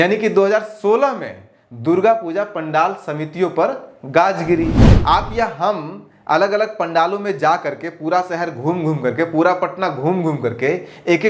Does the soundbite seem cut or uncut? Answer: cut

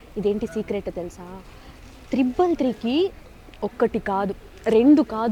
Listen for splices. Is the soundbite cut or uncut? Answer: uncut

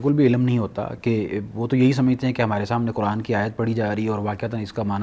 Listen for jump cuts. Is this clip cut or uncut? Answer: uncut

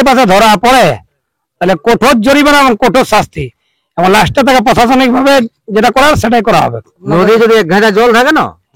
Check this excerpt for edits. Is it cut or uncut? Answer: cut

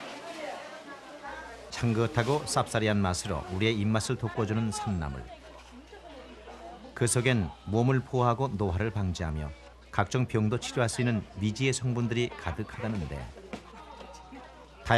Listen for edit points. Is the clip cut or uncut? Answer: uncut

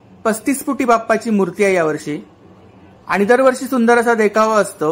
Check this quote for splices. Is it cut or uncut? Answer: uncut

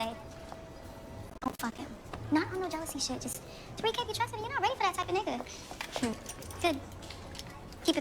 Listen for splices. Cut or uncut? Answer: cut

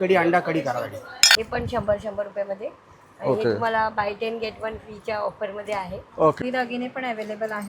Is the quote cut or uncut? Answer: cut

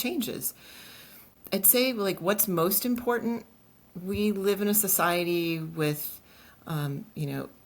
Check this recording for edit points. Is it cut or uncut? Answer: cut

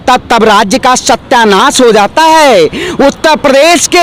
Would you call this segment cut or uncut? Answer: uncut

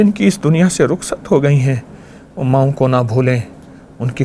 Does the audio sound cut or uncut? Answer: uncut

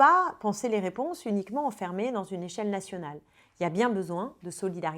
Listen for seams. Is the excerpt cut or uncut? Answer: uncut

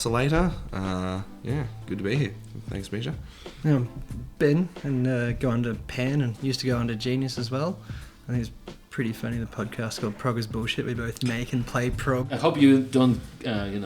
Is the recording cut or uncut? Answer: cut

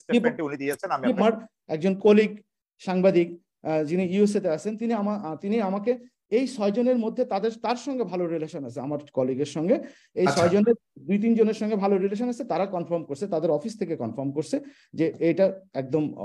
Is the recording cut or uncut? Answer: cut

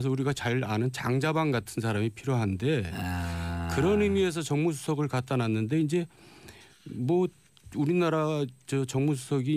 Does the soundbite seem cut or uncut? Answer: uncut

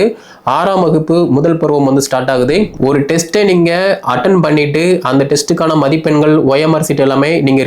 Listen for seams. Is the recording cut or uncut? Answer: cut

